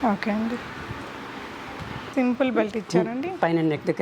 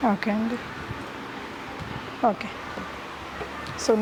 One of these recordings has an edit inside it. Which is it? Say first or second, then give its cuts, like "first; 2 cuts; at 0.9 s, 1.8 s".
first; 1 cut; at 2.0 s